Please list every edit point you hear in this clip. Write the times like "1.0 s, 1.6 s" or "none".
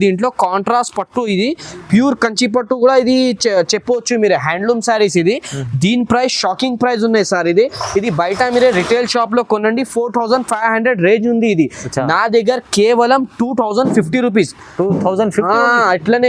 none